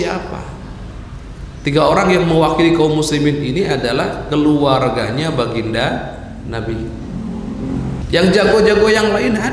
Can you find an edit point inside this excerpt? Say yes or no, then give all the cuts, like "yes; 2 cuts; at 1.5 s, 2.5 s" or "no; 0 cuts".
yes; 1 cut; at 8.0 s